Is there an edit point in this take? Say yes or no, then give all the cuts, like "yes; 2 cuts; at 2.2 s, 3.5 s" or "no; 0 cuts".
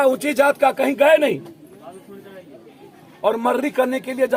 no; 0 cuts